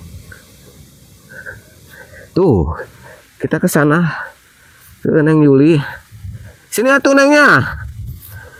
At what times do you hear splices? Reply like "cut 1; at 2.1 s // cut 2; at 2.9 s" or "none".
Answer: none